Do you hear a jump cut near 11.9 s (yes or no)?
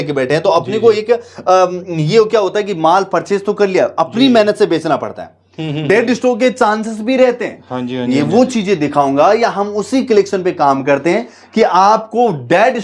no